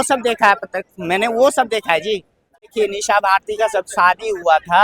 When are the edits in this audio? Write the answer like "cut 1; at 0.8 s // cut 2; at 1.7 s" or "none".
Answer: cut 1; at 2.7 s